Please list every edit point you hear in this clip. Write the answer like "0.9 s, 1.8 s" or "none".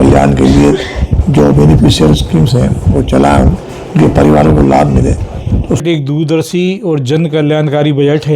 5.8 s